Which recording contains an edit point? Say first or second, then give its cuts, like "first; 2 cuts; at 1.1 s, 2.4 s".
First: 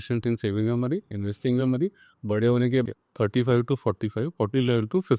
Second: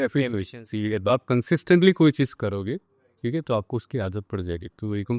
first; 1 cut; at 2.8 s